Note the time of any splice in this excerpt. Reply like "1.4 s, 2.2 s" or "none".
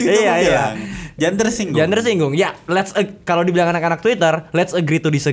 none